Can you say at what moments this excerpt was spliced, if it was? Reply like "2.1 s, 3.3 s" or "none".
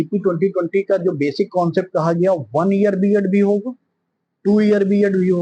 none